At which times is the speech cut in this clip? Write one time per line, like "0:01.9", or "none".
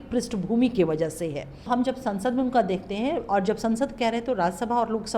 0:01.7